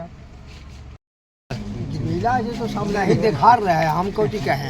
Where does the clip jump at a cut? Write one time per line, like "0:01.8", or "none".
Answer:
0:01.1

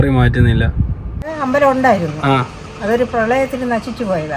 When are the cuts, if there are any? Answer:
0:01.3

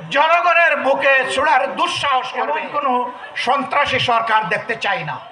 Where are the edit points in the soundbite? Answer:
0:02.4

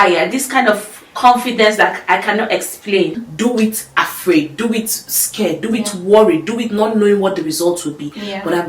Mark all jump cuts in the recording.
0:03.2

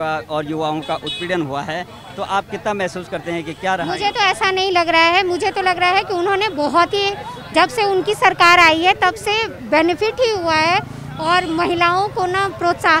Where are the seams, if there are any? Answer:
none

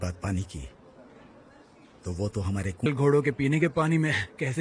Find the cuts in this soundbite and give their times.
0:02.9

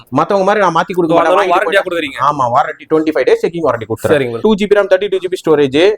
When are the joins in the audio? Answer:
0:04.4

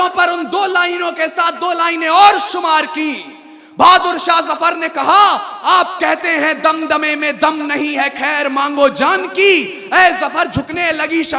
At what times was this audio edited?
none

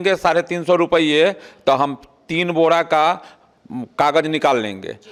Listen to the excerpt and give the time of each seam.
none

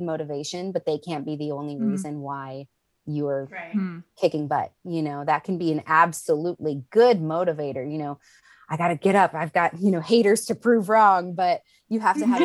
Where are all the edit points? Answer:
none

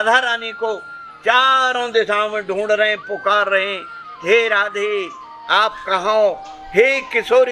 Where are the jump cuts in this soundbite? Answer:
none

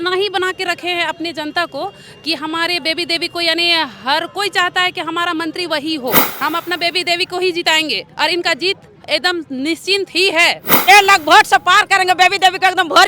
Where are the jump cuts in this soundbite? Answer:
0:06.3
0:10.8

